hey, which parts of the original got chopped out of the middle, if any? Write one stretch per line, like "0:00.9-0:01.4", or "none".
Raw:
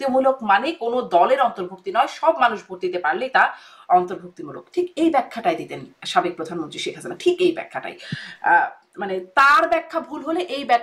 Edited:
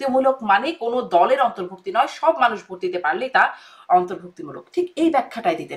none